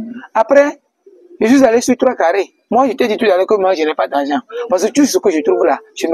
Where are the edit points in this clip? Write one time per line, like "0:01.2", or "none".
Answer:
0:02.6